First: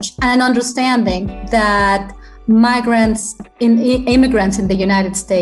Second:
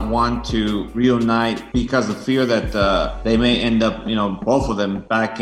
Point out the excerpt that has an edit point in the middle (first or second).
second